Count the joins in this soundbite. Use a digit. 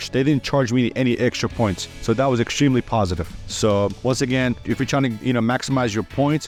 0